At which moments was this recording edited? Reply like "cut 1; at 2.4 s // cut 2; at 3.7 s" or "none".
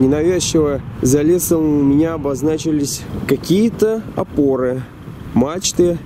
cut 1; at 0.9 s // cut 2; at 3.1 s